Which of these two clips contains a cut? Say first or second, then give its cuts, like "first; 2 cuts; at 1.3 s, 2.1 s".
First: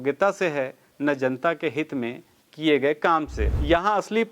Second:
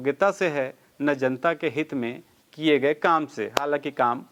first; 1 cut; at 3.4 s